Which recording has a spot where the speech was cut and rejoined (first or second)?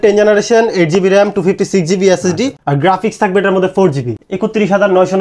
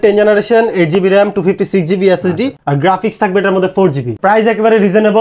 first